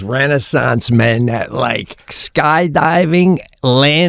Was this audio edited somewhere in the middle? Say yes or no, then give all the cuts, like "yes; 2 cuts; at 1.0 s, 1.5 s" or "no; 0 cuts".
yes; 1 cut; at 2.2 s